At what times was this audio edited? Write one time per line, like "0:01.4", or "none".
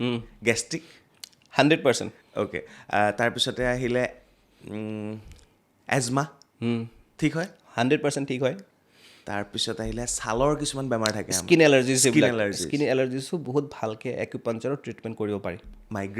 none